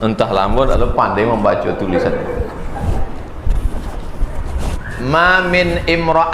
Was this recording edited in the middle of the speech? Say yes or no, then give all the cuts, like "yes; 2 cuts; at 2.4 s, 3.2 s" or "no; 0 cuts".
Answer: no; 0 cuts